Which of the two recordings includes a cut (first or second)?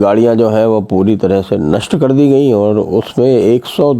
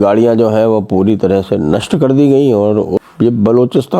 second